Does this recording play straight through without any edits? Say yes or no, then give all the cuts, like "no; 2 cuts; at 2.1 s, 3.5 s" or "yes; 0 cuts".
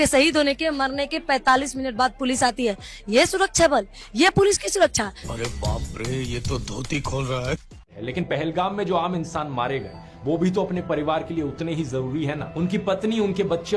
no; 2 cuts; at 5.2 s, 7.8 s